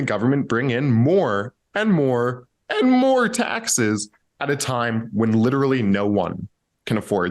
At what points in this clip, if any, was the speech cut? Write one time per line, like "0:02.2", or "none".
none